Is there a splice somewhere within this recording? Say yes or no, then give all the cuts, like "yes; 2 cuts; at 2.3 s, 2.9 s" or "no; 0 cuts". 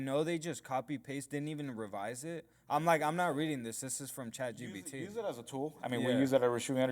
no; 0 cuts